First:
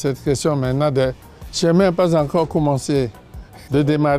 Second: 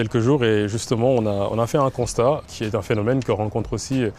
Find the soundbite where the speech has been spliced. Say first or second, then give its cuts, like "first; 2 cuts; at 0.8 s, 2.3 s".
second; 1 cut; at 2.5 s